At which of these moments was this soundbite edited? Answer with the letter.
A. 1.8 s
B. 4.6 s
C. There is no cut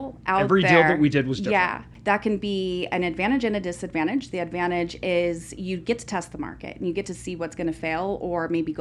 A